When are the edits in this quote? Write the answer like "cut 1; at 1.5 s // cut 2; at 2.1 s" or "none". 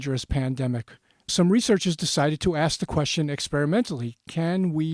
cut 1; at 1.3 s